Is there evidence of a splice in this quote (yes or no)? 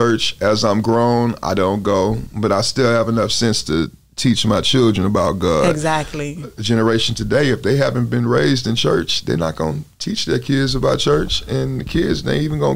no